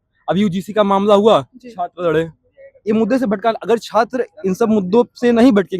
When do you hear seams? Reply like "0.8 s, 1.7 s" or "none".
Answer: none